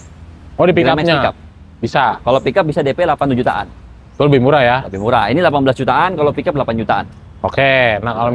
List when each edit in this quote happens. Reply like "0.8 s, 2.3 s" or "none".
none